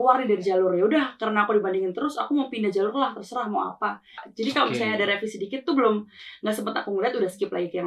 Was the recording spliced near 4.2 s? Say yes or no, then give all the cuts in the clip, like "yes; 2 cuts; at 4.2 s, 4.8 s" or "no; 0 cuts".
yes; 1 cut; at 4.2 s